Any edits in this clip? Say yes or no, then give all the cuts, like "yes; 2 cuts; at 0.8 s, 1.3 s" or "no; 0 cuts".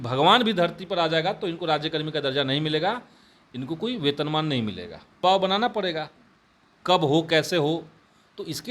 yes; 1 cut; at 5.2 s